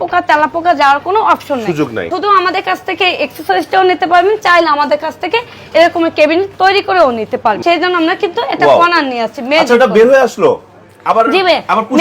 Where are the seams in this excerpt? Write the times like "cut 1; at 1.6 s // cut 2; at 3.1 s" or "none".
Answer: cut 1; at 2.1 s // cut 2; at 7.6 s

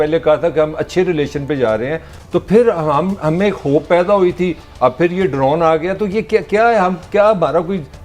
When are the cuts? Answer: cut 1; at 2.1 s

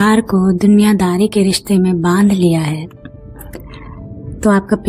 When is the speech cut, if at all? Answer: none

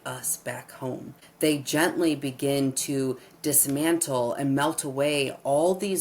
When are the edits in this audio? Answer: cut 1; at 1.2 s

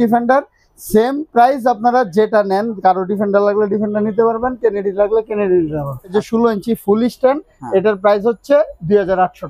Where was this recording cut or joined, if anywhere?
cut 1; at 6.1 s

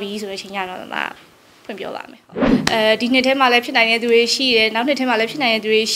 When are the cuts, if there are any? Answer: cut 1; at 2.5 s

